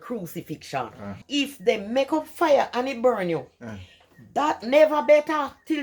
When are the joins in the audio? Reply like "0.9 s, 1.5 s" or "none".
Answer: 1.2 s